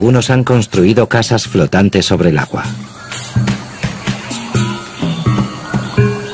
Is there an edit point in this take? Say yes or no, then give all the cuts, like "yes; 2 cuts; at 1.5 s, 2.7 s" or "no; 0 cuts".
yes; 1 cut; at 1.5 s